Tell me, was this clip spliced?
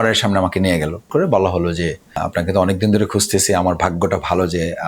yes; 2 cuts; at 1.1 s, 2.2 s

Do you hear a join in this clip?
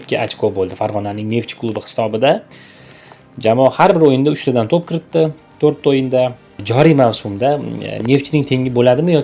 yes; 1 cut; at 6.5 s

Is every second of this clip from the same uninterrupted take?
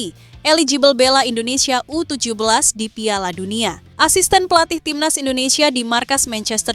no; 1 cut; at 3.9 s

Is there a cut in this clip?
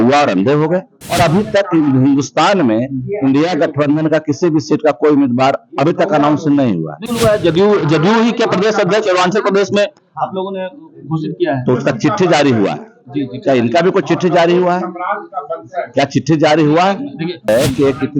yes; 3 cuts; at 1.0 s, 7.0 s, 17.5 s

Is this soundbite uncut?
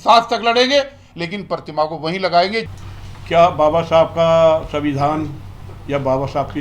yes; 0 cuts

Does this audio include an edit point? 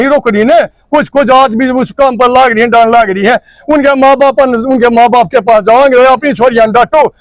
no; 0 cuts

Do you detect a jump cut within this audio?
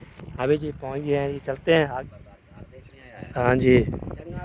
yes; 1 cut; at 1.9 s

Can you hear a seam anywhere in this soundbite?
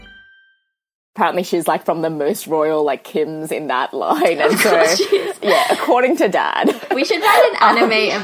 yes; 1 cut; at 1.2 s

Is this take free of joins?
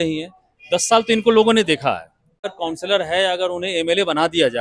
no; 1 cut; at 2.5 s

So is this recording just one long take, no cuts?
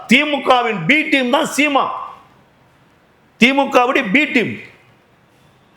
yes; 0 cuts

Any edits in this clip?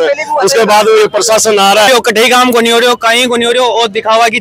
yes; 1 cut; at 1.9 s

